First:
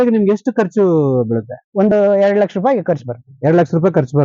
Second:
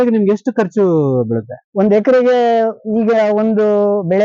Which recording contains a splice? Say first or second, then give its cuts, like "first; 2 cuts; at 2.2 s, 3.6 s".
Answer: first; 1 cut; at 1.9 s